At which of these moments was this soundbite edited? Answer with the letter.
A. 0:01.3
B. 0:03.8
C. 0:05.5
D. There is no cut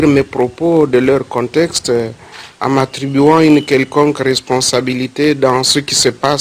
A